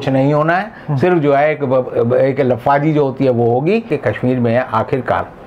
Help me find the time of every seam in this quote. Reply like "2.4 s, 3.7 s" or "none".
3.9 s